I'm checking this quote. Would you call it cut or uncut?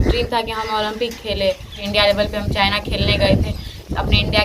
cut